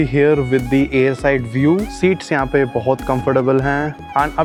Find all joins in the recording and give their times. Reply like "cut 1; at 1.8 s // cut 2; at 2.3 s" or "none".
none